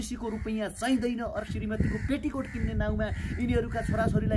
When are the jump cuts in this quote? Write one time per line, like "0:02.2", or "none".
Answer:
0:01.4